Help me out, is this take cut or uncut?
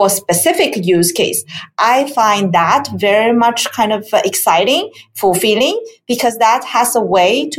uncut